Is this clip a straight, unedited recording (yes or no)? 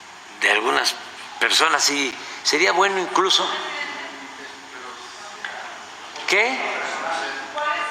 yes